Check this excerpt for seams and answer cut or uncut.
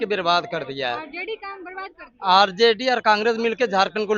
uncut